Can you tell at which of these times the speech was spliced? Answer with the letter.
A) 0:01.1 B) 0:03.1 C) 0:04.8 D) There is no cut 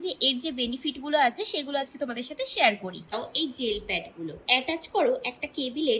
B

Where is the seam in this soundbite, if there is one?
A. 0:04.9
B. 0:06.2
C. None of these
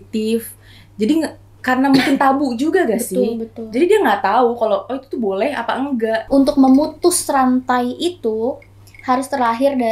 B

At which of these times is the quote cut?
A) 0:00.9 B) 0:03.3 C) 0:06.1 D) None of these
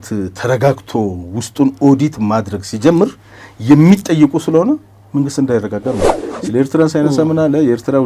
C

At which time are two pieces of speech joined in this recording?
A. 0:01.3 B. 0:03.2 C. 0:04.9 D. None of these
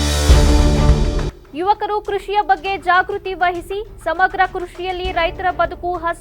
A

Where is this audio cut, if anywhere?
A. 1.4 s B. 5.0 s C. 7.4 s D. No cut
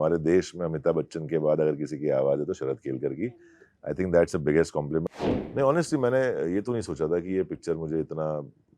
B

